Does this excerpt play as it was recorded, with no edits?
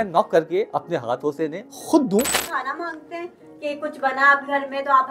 no; 1 cut; at 2.4 s

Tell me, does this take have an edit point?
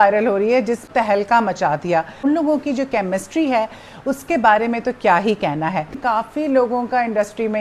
yes; 3 cuts; at 0.9 s, 2.2 s, 6.0 s

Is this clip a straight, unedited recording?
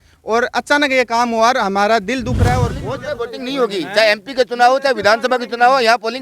no; 1 cut; at 2.8 s

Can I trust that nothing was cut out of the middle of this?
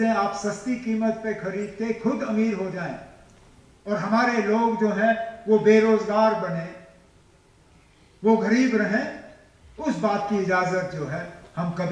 yes; 0 cuts

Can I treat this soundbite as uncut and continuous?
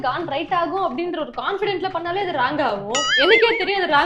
yes; 0 cuts

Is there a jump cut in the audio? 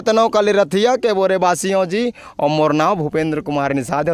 no; 0 cuts

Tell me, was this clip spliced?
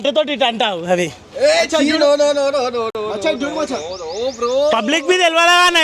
no; 0 cuts

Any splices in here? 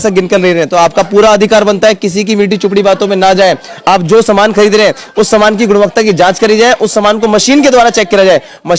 no; 0 cuts

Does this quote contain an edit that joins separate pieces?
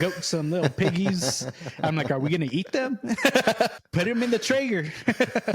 yes; 1 cut; at 3.8 s

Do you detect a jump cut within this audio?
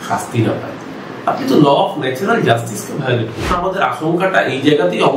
yes; 1 cut; at 3.5 s

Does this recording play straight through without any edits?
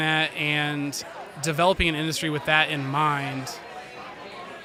yes; 0 cuts

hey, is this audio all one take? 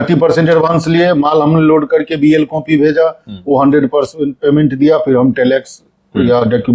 yes; 0 cuts

